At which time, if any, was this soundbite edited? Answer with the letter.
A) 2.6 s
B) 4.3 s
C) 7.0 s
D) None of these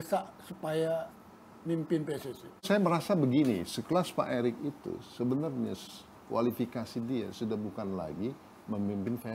A